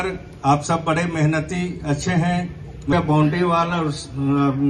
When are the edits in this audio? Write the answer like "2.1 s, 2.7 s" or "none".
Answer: 2.9 s